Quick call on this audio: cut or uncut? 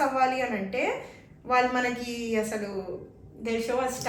uncut